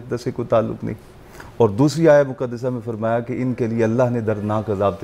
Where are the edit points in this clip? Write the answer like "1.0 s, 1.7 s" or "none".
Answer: none